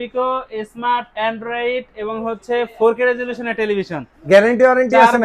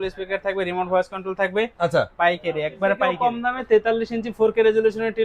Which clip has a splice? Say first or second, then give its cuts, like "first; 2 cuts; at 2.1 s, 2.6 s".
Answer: second; 1 cut; at 3.1 s